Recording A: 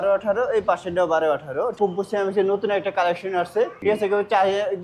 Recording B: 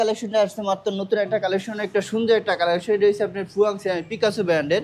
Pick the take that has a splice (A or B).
A